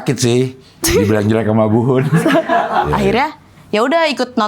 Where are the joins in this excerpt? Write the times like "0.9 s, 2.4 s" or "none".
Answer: 2.9 s